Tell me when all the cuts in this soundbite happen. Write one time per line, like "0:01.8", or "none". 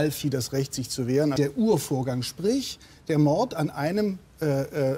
0:01.3